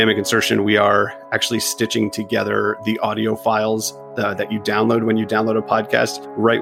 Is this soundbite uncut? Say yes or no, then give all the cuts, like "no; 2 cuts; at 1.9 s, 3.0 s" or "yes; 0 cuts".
yes; 0 cuts